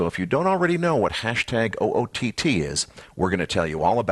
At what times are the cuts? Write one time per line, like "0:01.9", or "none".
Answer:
none

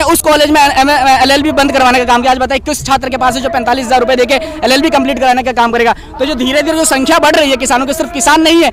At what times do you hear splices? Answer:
none

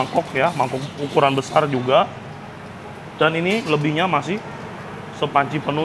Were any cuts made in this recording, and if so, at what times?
none

